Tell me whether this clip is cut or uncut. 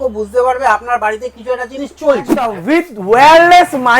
cut